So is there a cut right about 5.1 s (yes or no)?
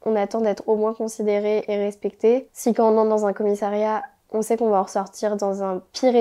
no